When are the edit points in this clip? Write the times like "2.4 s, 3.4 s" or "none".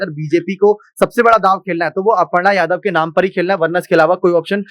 none